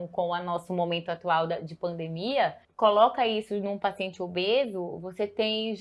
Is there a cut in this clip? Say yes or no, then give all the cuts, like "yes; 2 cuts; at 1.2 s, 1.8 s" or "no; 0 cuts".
yes; 1 cut; at 2.6 s